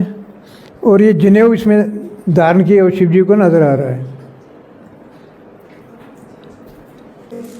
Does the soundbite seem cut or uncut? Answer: uncut